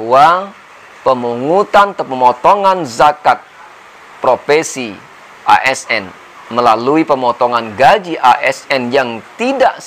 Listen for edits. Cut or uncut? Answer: uncut